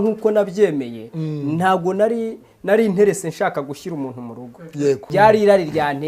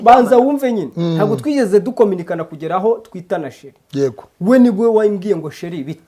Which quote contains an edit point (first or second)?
first